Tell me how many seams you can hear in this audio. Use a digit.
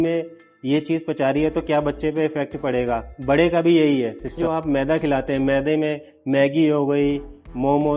1